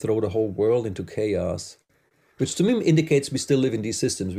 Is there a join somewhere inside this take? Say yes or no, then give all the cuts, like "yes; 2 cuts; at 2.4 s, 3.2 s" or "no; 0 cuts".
no; 0 cuts